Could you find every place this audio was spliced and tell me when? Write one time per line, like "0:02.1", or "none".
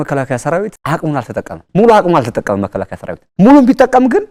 none